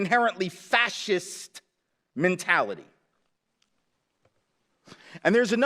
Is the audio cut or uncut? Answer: uncut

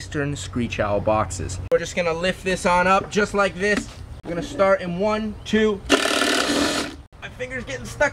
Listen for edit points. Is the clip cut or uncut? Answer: cut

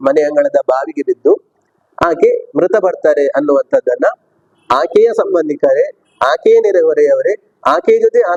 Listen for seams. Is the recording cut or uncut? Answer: uncut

